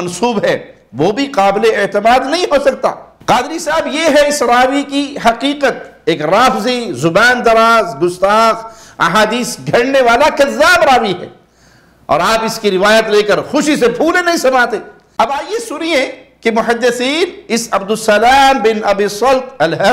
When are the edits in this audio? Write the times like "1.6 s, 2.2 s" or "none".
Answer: 3.1 s, 15.0 s